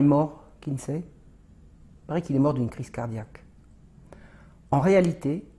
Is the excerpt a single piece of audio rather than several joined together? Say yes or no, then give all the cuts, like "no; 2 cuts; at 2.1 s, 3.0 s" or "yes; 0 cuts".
yes; 0 cuts